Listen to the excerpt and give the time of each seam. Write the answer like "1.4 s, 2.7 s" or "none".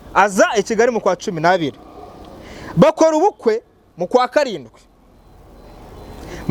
none